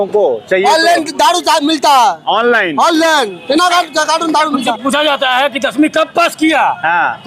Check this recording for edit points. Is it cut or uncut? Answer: cut